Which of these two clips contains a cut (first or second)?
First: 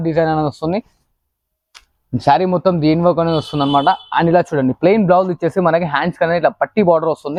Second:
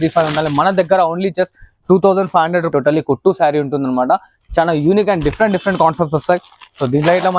second